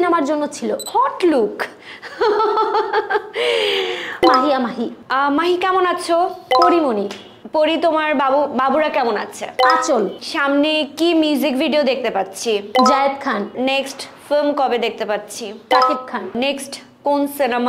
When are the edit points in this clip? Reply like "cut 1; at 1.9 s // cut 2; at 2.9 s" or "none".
cut 1; at 4.2 s // cut 2; at 13.5 s // cut 3; at 16.4 s